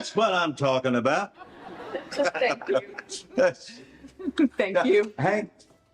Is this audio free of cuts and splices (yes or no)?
yes